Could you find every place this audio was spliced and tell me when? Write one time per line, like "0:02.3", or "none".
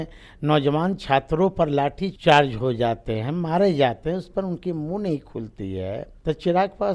0:02.1
0:06.1